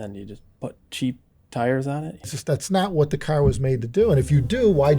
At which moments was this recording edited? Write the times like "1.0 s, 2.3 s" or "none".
2.4 s